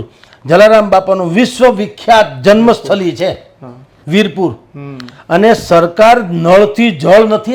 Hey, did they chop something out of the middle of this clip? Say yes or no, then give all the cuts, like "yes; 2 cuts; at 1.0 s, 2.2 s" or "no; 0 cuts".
no; 0 cuts